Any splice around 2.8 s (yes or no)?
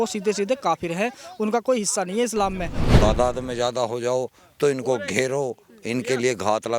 yes